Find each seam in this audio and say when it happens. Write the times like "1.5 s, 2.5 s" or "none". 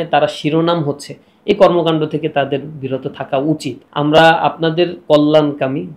3.8 s

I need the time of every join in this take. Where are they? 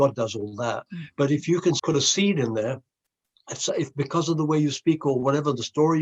1.8 s

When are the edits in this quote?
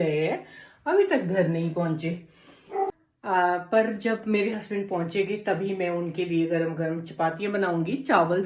3.1 s

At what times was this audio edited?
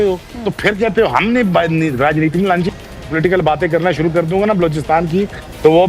2.7 s

